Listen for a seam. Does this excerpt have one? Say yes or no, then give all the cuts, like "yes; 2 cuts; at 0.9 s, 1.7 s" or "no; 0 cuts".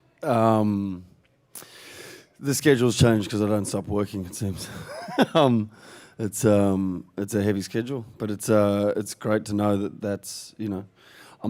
yes; 1 cut; at 7.7 s